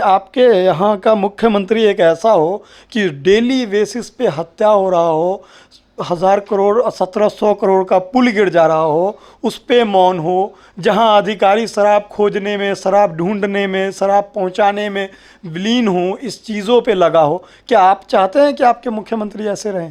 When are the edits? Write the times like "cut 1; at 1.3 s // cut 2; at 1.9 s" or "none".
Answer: none